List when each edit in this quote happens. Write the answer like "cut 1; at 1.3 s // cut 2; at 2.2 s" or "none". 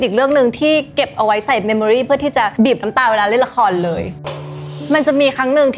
cut 1; at 2.5 s // cut 2; at 4.7 s